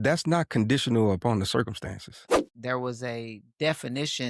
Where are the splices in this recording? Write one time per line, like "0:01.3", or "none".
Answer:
0:02.5